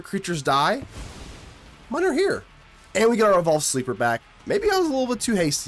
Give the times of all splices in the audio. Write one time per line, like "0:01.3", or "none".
0:02.6
0:04.3